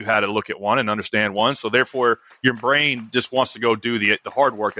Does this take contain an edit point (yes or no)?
no